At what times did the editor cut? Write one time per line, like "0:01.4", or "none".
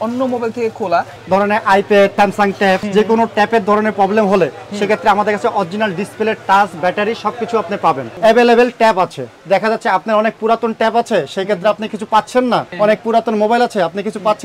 0:01.2
0:02.6
0:08.1
0:12.7